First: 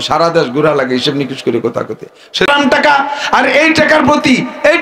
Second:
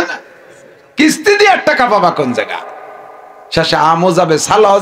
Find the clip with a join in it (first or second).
first